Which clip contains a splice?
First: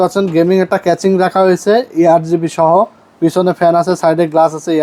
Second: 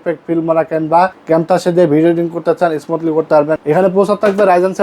second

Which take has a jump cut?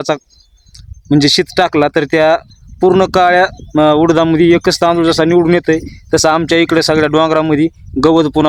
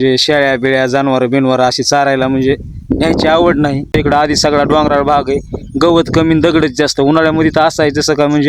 second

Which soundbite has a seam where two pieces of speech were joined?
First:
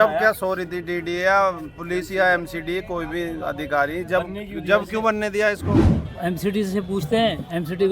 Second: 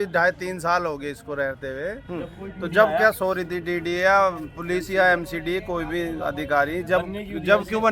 first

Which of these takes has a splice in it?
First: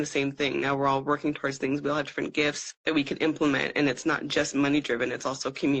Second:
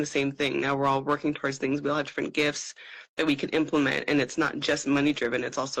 first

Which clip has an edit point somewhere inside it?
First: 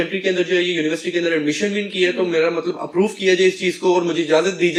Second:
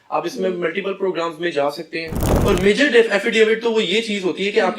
second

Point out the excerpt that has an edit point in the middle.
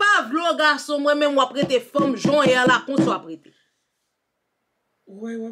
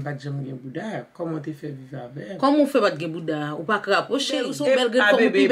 second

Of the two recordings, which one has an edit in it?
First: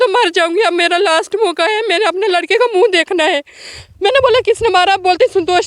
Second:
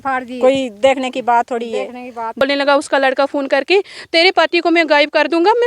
second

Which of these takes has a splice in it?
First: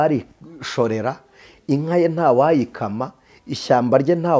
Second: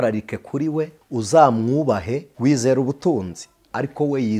second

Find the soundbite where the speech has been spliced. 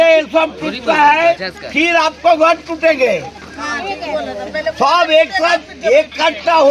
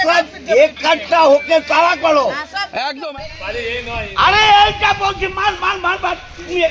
second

